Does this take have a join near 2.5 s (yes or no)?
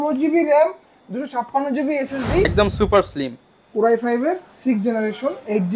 yes